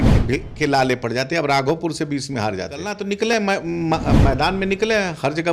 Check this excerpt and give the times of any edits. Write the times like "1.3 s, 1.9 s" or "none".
3.0 s